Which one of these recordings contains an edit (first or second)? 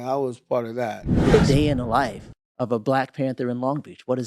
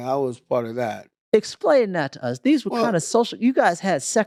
first